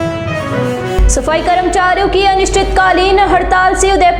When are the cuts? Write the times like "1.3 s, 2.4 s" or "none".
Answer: 0.9 s